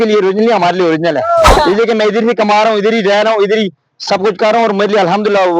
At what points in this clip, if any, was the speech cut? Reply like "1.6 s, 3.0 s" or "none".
1.5 s

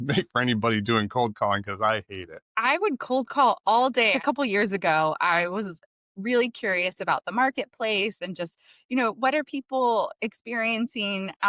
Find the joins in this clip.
2.5 s, 4.2 s

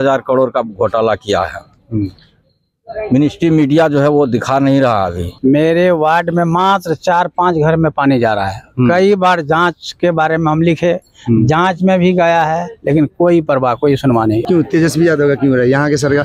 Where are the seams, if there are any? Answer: 5.3 s, 14.4 s

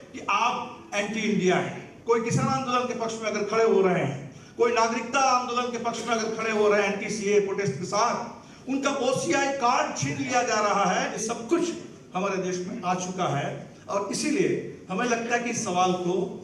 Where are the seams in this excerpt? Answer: 1.8 s, 11.2 s

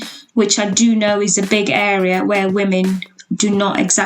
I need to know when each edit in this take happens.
none

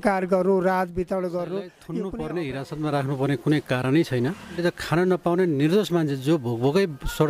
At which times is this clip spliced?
1.8 s, 4.6 s

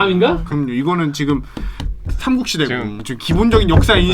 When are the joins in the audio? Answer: 2.9 s

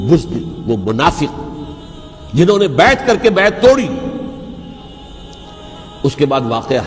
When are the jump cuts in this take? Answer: 4.9 s

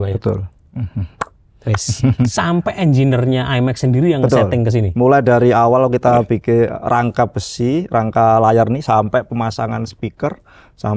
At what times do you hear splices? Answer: 2.3 s

